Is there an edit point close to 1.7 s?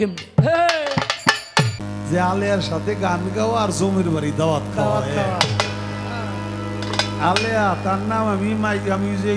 yes; 1 cut; at 1.7 s

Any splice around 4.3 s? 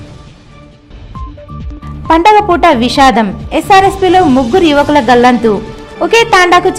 no; 2 cuts; at 0.8 s, 1.8 s

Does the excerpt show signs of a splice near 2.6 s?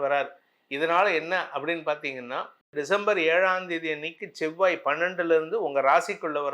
yes; 1 cut; at 2.6 s

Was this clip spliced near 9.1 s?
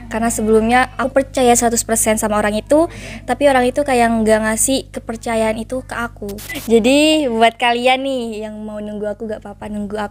no; 2 cuts; at 1.0 s, 6.6 s

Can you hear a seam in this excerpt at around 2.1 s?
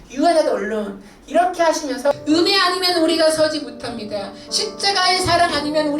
yes; 1 cut; at 2.1 s

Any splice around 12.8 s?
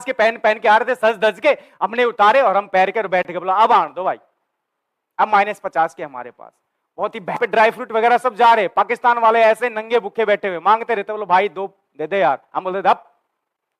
no; 1 cut; at 7.4 s

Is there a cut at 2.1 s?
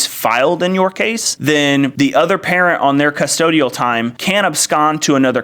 no; 1 cut; at 4.1 s

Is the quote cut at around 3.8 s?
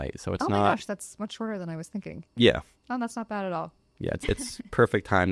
yes; 1 cut; at 3.8 s

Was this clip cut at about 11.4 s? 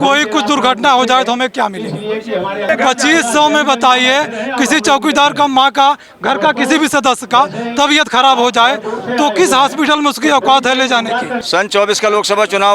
yes; 2 cuts; at 2.7 s, 11.4 s

